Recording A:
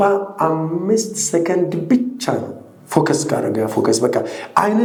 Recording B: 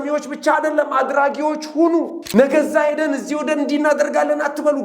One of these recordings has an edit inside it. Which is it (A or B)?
B